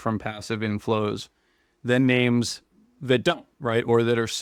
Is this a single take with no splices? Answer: yes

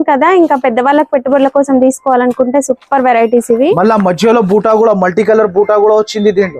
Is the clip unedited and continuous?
yes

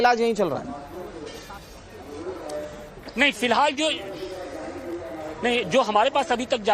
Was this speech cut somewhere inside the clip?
no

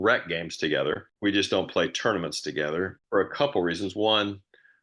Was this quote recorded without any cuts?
no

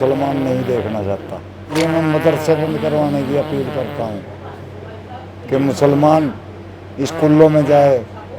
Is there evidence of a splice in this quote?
yes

